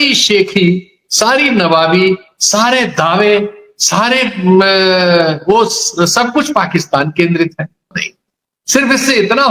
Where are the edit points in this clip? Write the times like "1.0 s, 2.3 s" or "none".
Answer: none

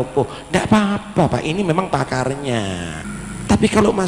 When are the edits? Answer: 3.0 s

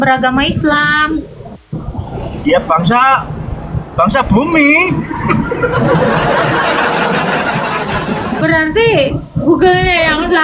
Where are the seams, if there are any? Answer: 8.4 s

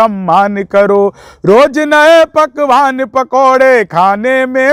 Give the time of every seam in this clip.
none

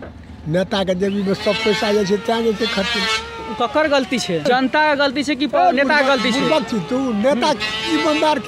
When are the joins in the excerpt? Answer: 4.5 s

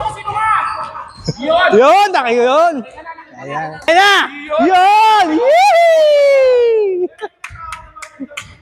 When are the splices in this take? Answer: 3.9 s

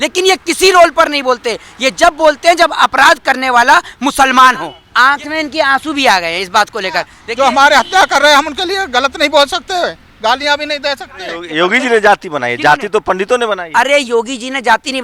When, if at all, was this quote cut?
4.8 s, 7.2 s, 11.4 s

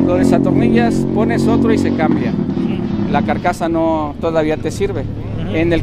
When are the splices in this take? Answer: none

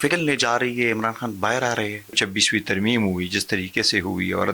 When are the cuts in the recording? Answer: 2.2 s

